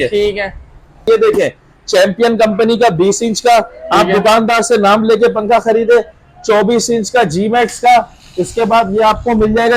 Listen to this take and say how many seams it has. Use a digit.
1